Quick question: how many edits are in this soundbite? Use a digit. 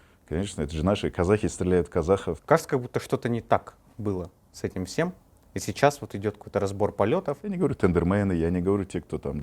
2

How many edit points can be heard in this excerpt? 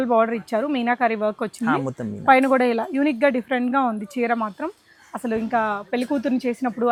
0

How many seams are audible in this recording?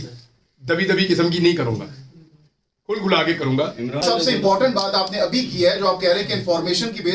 1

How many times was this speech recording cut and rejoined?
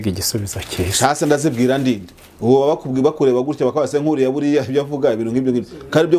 0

